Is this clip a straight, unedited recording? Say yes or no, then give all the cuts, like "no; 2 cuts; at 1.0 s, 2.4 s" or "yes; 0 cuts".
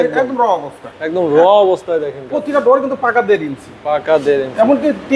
yes; 0 cuts